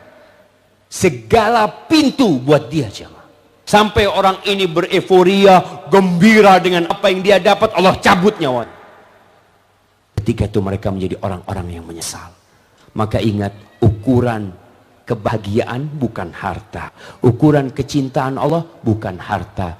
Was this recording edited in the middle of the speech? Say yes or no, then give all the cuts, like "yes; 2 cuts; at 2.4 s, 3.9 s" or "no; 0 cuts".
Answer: no; 0 cuts